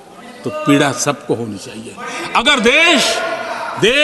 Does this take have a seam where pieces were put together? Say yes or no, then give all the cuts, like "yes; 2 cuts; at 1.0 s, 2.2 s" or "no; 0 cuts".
no; 0 cuts